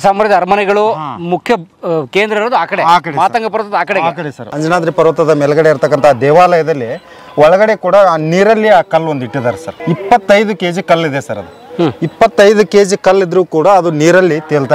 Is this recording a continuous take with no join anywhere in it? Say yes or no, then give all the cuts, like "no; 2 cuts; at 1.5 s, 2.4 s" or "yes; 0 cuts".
no; 2 cuts; at 4.5 s, 9.7 s